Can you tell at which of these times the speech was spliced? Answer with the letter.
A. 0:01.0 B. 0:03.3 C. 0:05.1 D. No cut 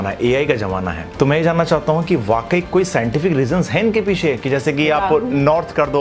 A